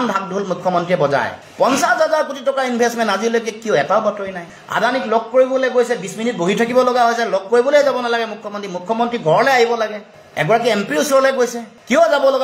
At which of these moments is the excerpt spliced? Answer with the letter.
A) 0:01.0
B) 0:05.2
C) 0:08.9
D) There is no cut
D